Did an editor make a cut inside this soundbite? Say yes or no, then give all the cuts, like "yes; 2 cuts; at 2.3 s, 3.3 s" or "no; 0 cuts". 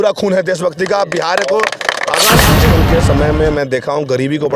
yes; 1 cut; at 2.6 s